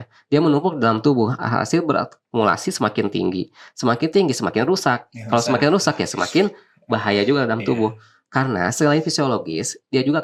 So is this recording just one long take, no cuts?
yes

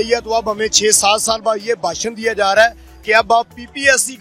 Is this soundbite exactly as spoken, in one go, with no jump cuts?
yes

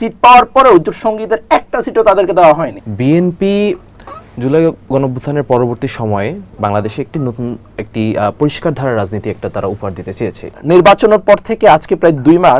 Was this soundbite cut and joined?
yes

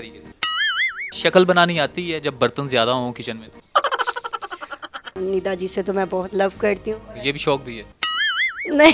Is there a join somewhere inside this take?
yes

